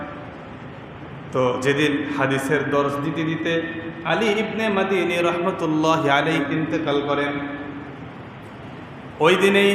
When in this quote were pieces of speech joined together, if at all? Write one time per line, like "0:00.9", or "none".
0:06.4